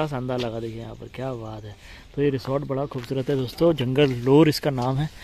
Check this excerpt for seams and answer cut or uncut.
uncut